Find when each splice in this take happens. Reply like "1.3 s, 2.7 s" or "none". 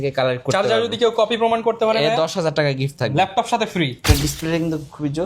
4.0 s